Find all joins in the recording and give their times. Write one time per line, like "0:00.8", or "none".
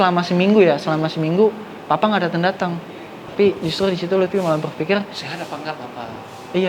0:03.2